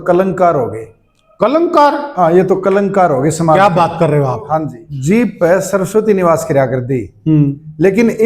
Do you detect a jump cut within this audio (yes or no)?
yes